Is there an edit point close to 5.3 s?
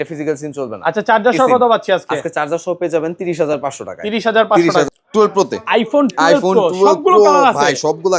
yes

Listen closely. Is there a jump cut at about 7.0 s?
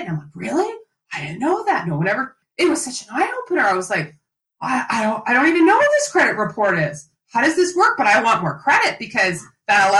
no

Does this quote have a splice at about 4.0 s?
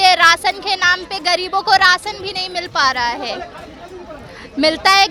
no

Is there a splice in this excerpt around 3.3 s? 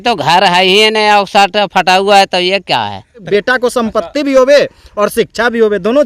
yes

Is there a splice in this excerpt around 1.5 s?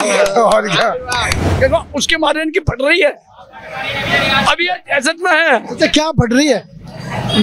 yes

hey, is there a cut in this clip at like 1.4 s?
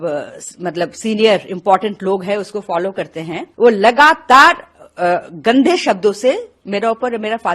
no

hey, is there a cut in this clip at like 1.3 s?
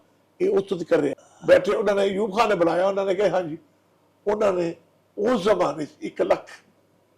yes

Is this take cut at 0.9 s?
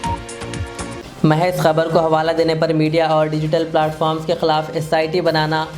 yes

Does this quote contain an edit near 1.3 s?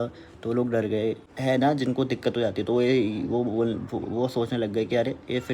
yes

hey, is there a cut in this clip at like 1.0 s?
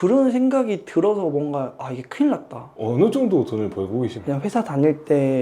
no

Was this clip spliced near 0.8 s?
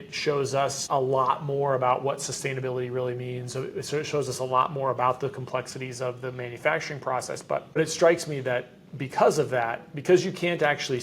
yes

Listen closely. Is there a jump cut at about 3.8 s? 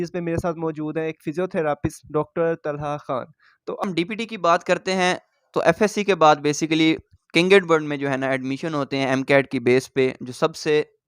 yes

